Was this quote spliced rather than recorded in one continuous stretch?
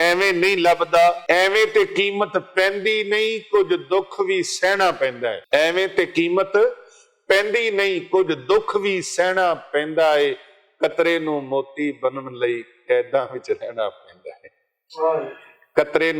yes; 2 cuts; at 1.2 s, 5.4 s

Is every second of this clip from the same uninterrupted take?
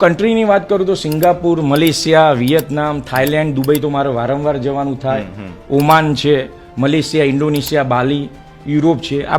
yes; 0 cuts

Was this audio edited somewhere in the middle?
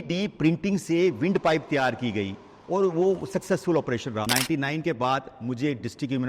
yes; 1 cut; at 4.2 s

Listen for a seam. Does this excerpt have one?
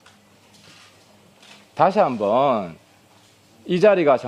yes; 1 cut; at 1.9 s

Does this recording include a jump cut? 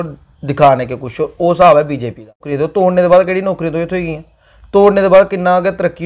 yes; 1 cut; at 2.4 s

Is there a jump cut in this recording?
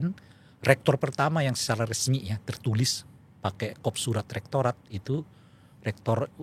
no; 0 cuts

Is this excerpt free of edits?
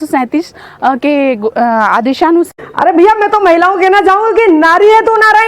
no; 1 cut; at 2.5 s

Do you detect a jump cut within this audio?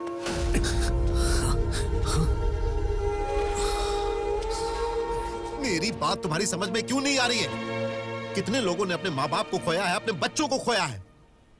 yes; 1 cut; at 5.5 s

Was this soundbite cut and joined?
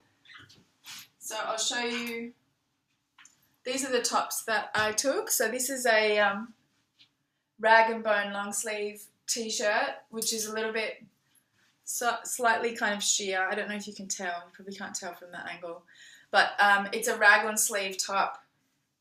no; 0 cuts

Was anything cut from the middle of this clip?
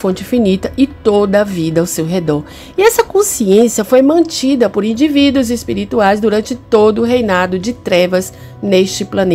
no; 0 cuts

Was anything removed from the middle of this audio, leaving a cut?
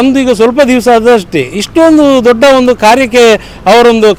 no; 0 cuts

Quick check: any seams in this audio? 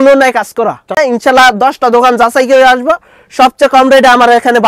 yes; 1 cut; at 1.0 s

